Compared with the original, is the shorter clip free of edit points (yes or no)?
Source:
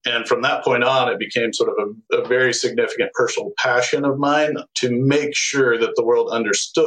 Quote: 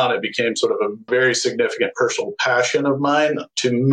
no